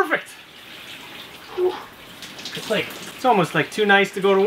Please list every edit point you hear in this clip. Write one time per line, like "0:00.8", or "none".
0:03.0